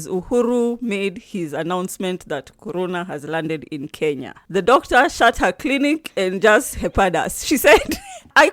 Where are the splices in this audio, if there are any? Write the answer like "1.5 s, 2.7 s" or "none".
none